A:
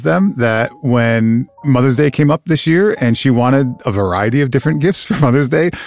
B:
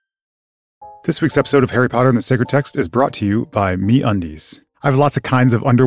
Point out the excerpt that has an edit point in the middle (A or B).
B